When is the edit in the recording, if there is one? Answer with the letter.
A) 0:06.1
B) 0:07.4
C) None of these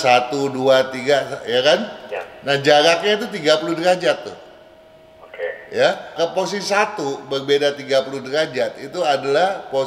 A